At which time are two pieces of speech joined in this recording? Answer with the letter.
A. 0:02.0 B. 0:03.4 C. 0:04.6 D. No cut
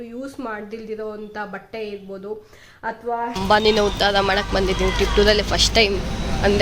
B